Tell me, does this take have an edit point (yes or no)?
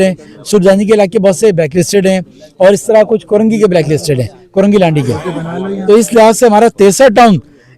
no